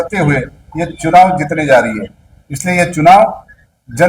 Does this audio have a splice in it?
no; 0 cuts

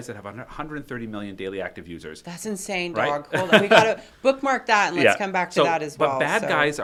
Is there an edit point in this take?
no; 0 cuts

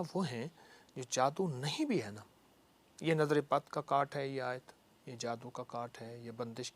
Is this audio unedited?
yes; 0 cuts

